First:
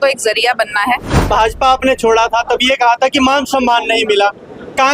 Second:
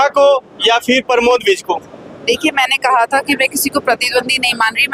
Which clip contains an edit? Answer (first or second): first